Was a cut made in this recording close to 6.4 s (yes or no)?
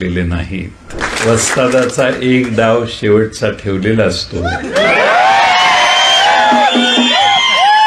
no